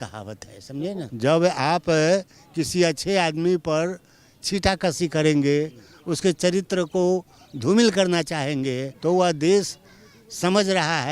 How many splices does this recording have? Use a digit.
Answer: 2